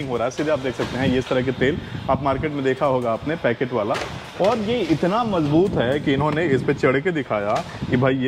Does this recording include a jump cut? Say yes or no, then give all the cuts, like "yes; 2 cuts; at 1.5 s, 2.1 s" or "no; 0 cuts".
no; 0 cuts